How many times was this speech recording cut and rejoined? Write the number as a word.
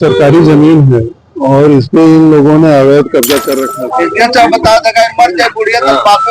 one